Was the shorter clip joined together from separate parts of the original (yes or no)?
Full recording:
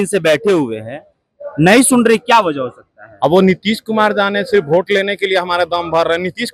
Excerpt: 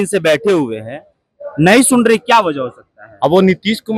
no